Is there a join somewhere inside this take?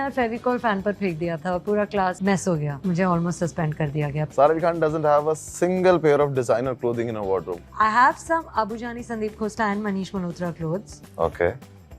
yes; 3 cuts; at 2.6 s, 4.2 s, 7.6 s

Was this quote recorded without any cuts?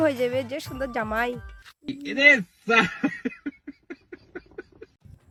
yes; 0 cuts

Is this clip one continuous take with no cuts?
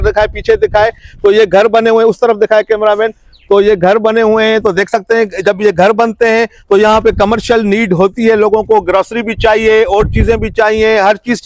yes; 0 cuts

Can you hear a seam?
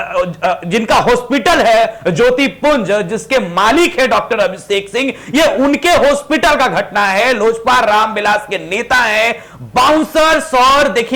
no; 0 cuts

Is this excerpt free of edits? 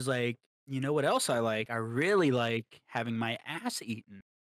no; 1 cut; at 1.7 s

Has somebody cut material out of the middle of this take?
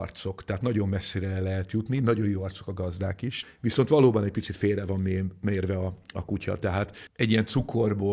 no; 0 cuts

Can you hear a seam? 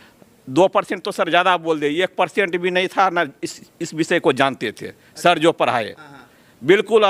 no; 0 cuts

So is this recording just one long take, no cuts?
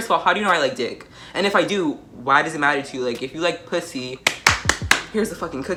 yes; 0 cuts

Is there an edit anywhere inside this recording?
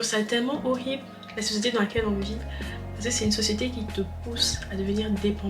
no; 0 cuts

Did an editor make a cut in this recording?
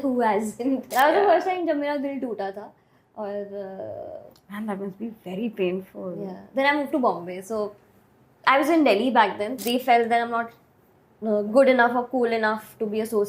yes; 2 cuts; at 0.9 s, 9.6 s

